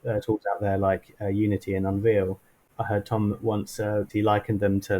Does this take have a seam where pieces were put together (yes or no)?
yes